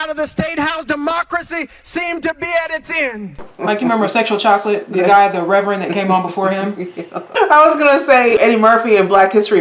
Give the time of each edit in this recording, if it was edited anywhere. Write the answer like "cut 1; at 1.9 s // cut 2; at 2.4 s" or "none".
cut 1; at 3.4 s // cut 2; at 7.3 s // cut 3; at 8.4 s